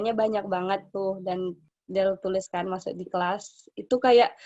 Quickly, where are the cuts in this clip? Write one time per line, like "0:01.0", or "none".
0:01.7